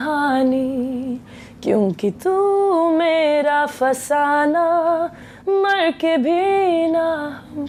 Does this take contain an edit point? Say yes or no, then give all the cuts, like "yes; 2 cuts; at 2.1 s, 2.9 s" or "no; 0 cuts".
no; 0 cuts